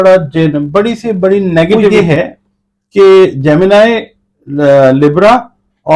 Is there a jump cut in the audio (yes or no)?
yes